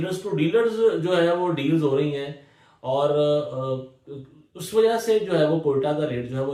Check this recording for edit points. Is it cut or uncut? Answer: uncut